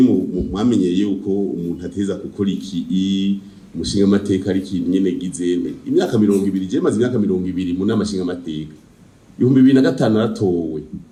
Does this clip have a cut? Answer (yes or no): no